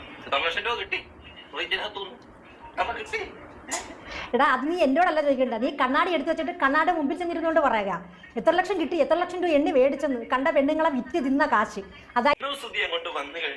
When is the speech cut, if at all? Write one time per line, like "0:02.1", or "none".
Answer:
0:12.2